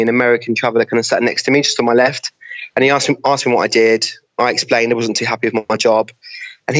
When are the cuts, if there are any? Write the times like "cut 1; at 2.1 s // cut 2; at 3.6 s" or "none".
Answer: cut 1; at 1.4 s